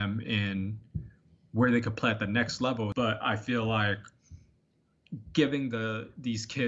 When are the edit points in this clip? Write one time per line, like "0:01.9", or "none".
0:02.9